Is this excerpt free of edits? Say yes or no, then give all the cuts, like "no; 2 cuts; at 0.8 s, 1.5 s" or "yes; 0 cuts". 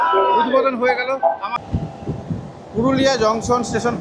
no; 1 cut; at 1.6 s